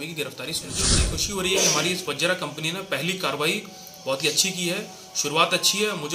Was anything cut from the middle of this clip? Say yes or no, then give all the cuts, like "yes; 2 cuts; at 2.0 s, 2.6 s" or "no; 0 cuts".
yes; 1 cut; at 1.1 s